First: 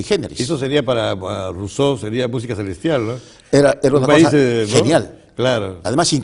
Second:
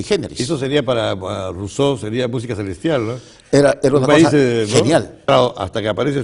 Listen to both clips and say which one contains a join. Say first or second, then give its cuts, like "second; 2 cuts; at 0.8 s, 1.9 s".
first; 1 cut; at 5.2 s